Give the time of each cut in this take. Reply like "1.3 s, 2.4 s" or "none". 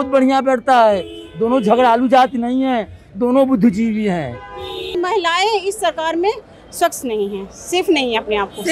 5.0 s